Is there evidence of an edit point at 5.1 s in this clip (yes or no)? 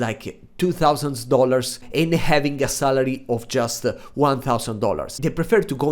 yes